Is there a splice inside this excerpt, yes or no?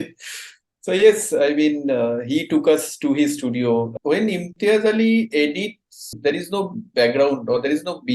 yes